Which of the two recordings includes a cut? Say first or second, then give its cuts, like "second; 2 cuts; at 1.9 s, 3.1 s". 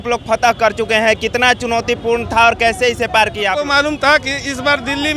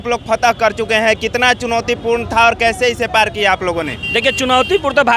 first; 1 cut; at 3.6 s